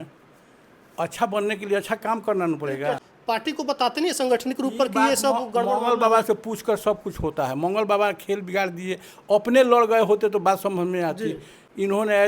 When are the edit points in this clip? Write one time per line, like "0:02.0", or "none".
0:03.0